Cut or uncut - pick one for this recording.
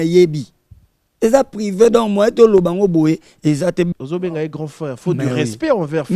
cut